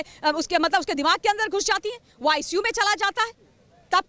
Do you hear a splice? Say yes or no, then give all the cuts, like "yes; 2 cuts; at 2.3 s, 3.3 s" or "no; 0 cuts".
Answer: no; 0 cuts